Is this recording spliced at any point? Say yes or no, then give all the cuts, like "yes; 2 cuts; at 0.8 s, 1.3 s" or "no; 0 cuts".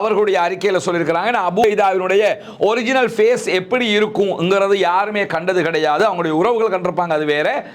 no; 0 cuts